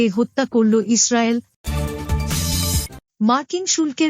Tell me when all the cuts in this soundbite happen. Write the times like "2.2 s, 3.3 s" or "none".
1.6 s, 3.0 s